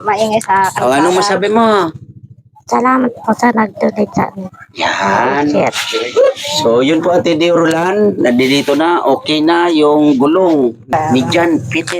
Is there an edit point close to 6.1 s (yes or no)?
no